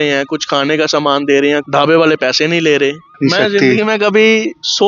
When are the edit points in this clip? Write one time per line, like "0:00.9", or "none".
0:01.6
0:03.1